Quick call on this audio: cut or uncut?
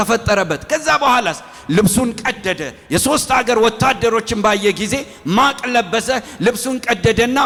uncut